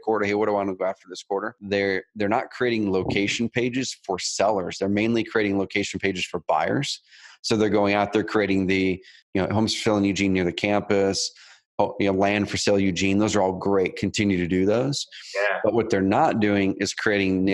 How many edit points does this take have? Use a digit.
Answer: 2